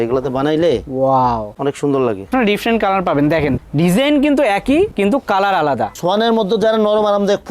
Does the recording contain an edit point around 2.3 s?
yes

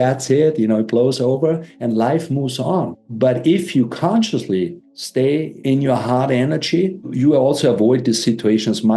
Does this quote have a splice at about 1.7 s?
no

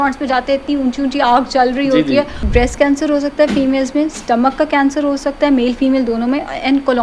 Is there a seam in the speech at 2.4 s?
yes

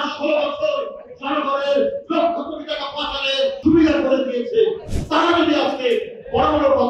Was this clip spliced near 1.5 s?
no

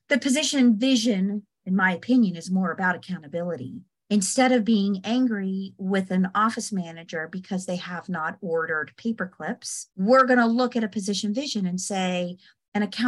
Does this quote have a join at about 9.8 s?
yes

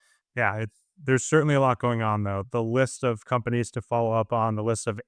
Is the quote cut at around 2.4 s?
yes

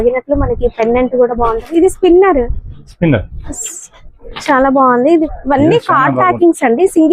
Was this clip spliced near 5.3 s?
yes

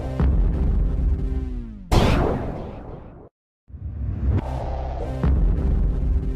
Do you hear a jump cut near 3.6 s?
yes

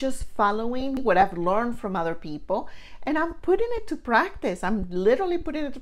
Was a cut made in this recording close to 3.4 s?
no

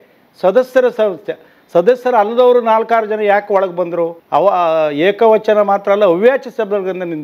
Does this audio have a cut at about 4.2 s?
yes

